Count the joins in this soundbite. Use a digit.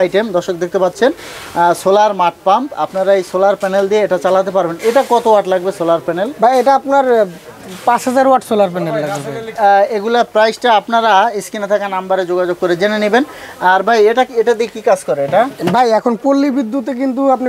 0